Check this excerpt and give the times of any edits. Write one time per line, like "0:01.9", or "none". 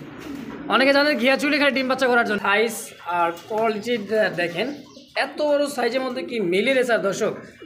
0:02.4